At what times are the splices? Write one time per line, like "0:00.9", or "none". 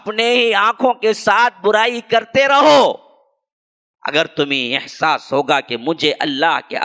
none